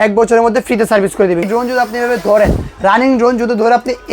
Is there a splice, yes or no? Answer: yes